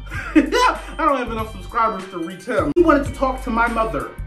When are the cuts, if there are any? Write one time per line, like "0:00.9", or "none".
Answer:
0:02.8